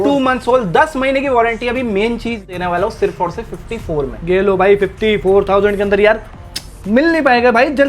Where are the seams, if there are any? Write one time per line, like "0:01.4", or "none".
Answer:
0:02.5